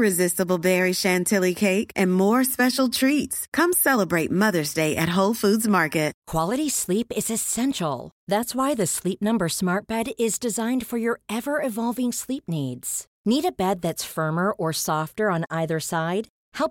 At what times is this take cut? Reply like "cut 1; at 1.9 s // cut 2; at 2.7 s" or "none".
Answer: cut 1; at 6.2 s